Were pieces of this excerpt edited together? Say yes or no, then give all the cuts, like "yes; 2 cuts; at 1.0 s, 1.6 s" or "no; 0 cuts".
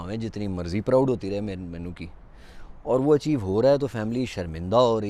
no; 0 cuts